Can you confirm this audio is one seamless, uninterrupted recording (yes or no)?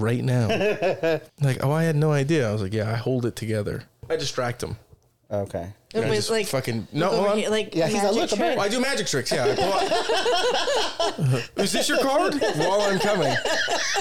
no